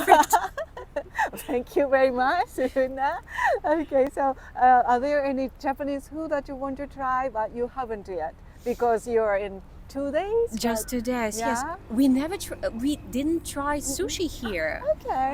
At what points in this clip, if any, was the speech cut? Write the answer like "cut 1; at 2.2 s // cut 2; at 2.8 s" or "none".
none